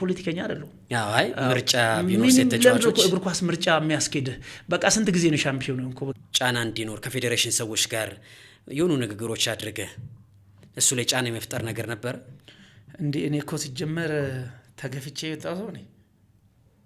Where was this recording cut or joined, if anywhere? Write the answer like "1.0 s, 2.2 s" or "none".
6.1 s